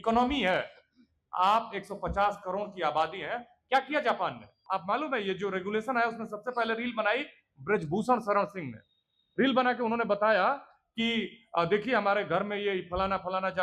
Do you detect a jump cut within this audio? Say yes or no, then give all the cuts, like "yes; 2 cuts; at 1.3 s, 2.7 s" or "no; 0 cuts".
yes; 1 cut; at 4.6 s